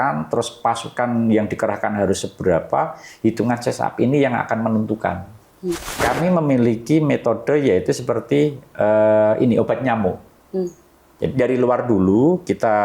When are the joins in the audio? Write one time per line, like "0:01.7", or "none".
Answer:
0:05.9